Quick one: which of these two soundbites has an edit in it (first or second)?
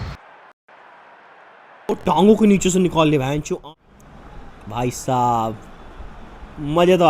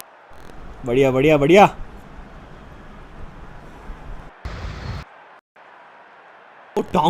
first